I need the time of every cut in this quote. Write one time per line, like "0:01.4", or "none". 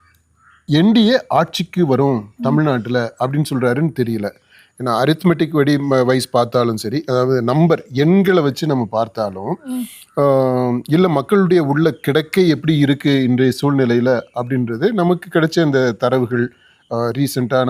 none